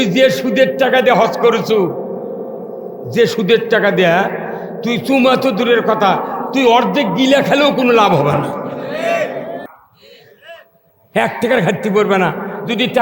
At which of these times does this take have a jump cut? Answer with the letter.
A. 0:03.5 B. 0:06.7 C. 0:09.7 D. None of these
C